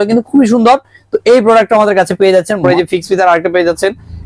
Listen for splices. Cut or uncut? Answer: cut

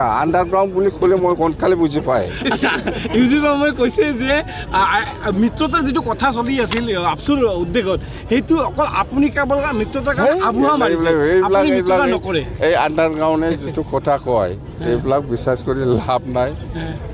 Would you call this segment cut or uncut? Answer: uncut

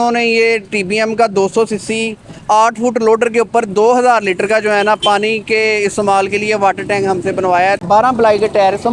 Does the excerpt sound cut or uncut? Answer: cut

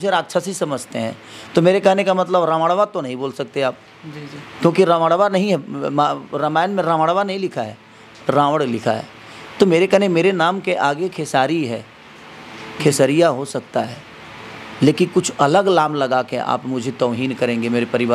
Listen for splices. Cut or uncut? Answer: uncut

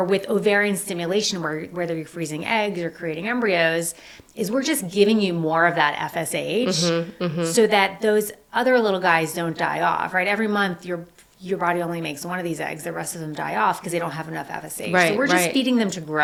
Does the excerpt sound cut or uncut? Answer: uncut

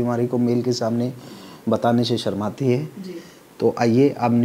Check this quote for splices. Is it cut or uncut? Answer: uncut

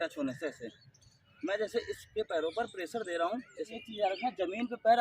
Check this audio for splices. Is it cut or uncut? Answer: cut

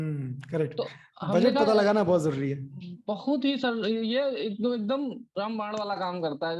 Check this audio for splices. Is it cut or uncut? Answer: uncut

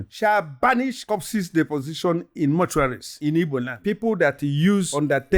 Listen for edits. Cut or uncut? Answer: cut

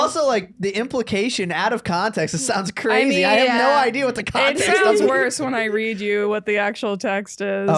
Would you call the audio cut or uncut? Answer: uncut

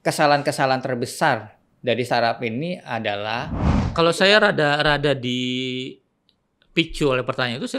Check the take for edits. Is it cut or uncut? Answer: cut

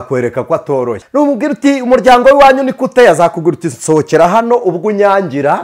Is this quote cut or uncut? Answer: cut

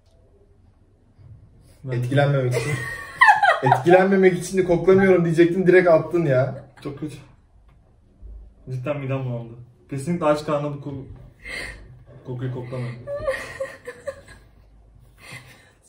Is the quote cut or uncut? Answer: uncut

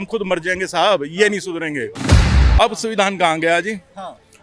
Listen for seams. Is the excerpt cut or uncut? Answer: cut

